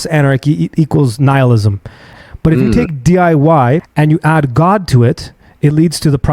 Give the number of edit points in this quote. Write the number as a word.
two